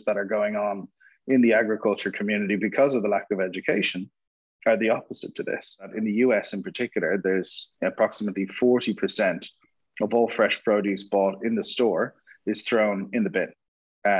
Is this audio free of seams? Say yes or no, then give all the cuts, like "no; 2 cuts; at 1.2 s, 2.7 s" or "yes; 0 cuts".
no; 1 cut; at 5.9 s